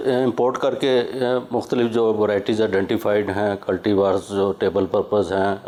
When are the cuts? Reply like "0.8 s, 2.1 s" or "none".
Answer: none